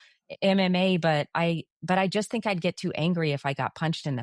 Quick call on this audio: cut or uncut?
uncut